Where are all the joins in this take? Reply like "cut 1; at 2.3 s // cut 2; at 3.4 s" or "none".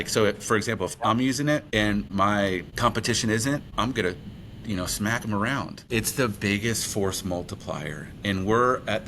cut 1; at 5.8 s